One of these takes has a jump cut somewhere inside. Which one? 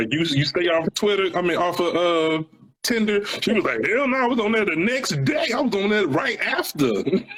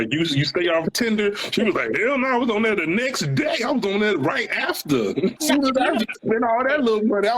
second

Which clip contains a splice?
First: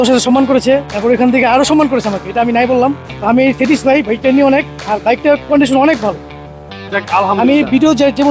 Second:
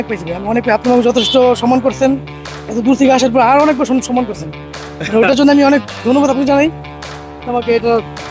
first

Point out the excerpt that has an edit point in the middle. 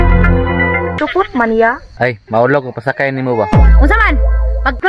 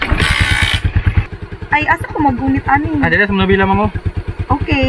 first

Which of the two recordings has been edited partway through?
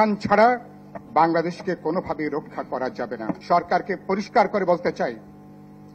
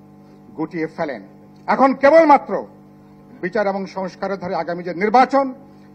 first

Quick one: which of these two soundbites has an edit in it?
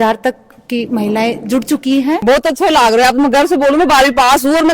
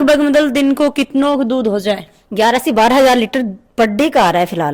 first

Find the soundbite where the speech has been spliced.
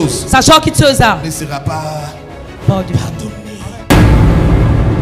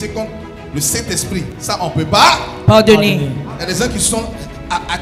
first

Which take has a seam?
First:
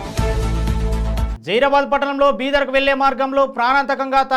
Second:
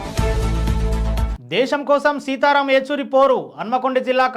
first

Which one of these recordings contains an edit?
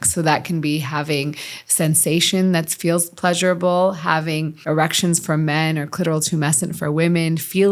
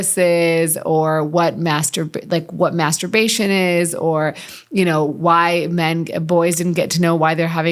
first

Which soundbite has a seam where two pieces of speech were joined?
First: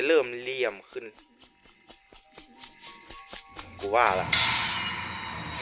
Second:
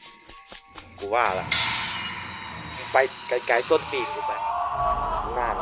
second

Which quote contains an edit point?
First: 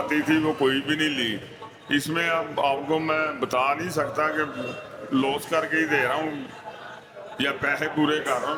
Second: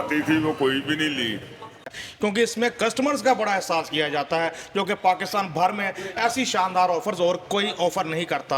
second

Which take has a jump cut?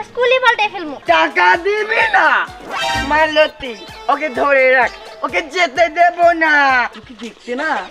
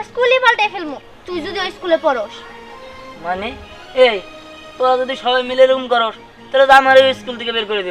first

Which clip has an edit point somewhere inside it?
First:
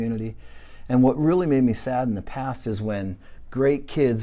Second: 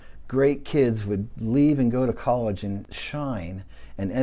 second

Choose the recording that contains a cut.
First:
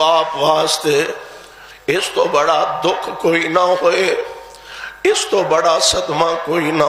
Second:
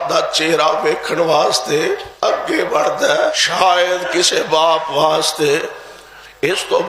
second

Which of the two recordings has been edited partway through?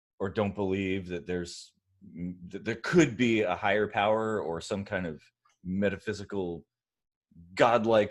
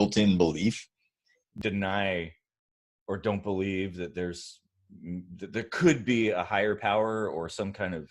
second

